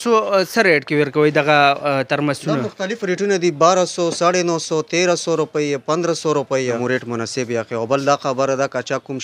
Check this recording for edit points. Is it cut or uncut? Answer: cut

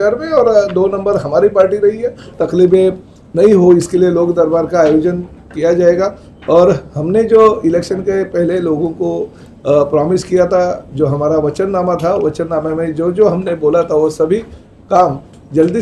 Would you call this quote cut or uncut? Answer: cut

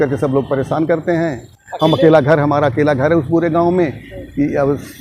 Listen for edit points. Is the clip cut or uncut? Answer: uncut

